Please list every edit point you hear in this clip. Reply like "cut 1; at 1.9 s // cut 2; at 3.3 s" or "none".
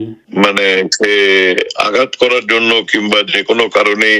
none